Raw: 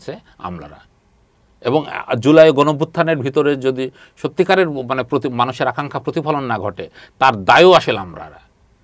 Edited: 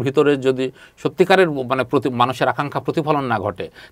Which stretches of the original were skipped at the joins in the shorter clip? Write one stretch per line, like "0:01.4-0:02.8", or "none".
none

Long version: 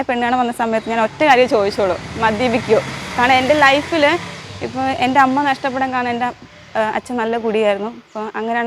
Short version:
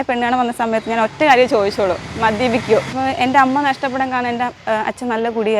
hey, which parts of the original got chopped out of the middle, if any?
0:02.9-0:04.7
0:06.4-0:06.7

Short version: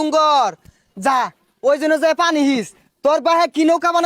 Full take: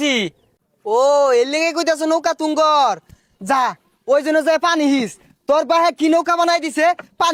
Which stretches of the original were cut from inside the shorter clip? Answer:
none

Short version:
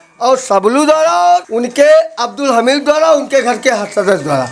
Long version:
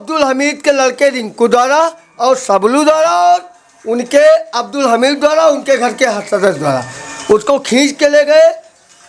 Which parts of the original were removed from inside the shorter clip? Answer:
0:03.5-0:03.9

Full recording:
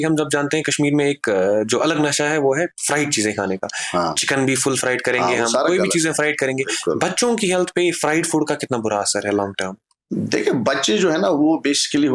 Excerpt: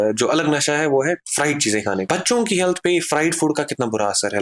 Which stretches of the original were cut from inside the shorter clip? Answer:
0:03.6-0:07.0

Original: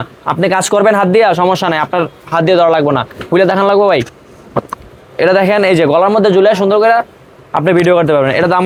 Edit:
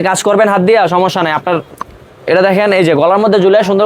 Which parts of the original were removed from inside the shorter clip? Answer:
0:02.2-0:04.7

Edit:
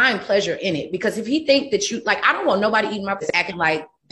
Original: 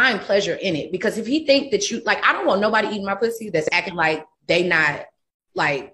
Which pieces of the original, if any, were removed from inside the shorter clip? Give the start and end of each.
0:03.2-0:03.6

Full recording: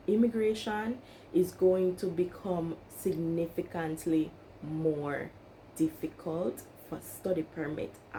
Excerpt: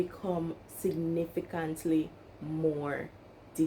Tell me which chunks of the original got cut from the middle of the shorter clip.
none

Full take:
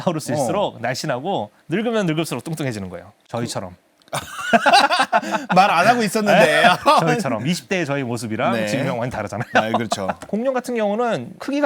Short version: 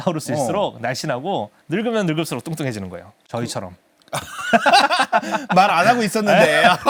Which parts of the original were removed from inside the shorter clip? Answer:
none

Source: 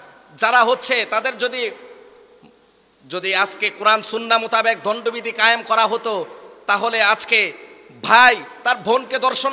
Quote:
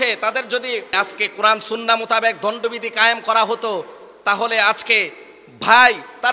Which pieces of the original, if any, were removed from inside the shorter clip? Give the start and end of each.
0:01.8-0:03.4

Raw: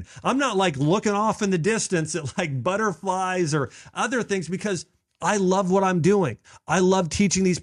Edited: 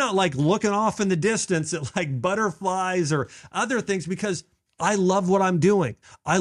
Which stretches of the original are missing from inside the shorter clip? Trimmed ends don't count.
none

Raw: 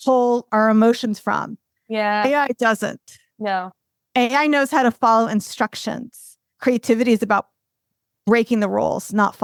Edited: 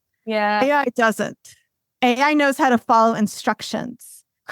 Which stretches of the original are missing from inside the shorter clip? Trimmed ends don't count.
0:03.3-0:03.8

